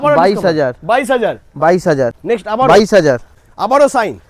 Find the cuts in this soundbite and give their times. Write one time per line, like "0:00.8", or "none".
0:02.1
0:03.3